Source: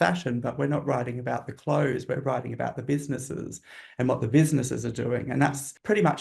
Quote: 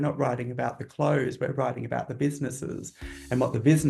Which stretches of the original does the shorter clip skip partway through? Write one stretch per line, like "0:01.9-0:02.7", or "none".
none